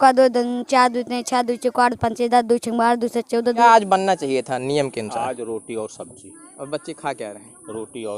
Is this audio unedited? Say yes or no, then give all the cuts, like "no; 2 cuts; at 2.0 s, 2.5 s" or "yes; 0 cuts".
no; 1 cut; at 3.6 s